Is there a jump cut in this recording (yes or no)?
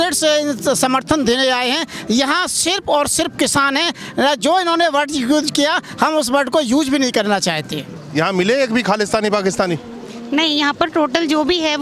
yes